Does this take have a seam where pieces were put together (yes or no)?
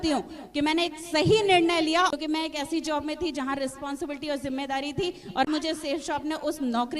yes